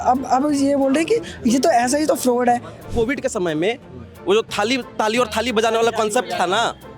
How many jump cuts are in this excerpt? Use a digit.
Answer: 1